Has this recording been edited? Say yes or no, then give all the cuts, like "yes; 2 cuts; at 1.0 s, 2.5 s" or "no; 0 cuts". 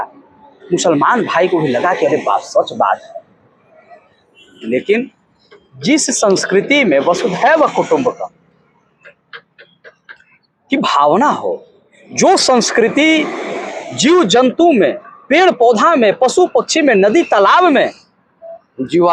no; 0 cuts